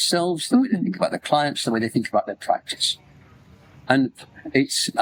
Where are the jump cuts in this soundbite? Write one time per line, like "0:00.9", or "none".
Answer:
none

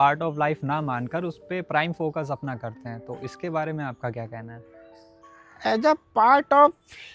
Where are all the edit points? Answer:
none

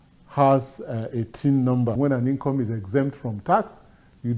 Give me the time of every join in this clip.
0:01.9

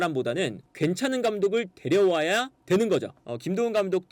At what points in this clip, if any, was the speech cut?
0:03.2

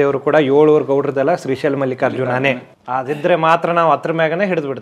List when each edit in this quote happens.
0:02.7

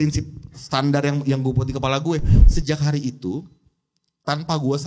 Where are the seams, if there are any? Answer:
0:02.3

